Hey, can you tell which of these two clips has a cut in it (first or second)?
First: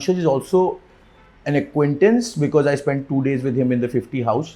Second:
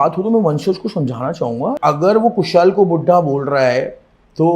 second